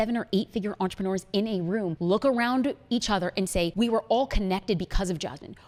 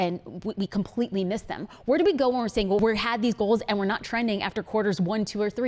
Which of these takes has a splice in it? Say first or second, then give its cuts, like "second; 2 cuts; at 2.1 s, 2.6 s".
second; 1 cut; at 2.8 s